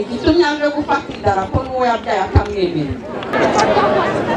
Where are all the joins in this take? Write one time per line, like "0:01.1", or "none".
0:03.3